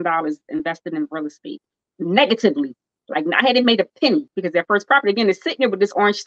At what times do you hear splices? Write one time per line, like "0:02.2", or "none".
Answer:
0:04.3